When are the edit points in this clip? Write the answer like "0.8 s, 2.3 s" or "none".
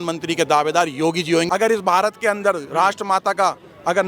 1.5 s

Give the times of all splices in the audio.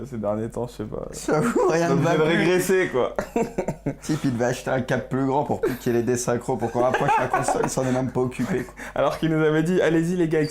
4.0 s

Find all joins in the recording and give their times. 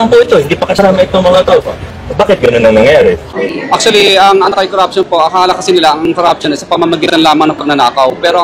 3.3 s

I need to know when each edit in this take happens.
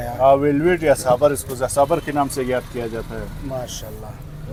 none

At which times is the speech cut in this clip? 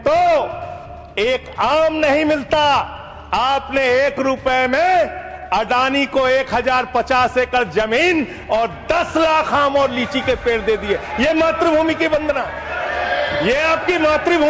none

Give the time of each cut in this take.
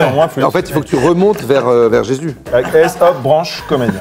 2.3 s

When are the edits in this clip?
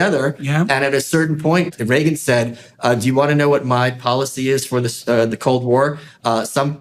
1.7 s

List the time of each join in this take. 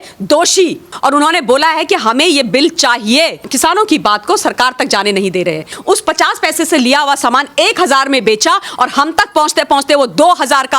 0.9 s, 3.5 s, 5.8 s

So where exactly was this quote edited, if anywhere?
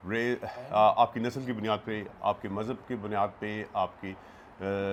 none

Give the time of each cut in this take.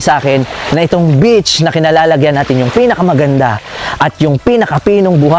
none

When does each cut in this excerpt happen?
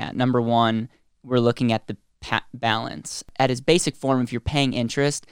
3.3 s

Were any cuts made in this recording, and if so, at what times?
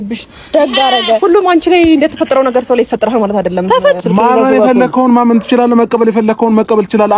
4.0 s

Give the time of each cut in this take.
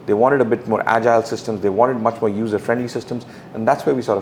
none

